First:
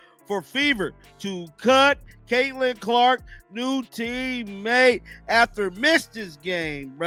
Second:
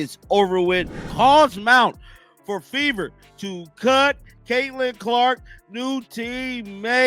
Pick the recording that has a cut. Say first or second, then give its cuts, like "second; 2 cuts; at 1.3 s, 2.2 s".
second; 1 cut; at 1.0 s